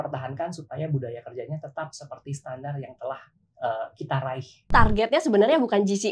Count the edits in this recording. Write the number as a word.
one